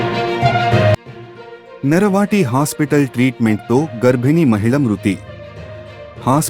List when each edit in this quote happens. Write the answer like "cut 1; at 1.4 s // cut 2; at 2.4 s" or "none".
cut 1; at 1.0 s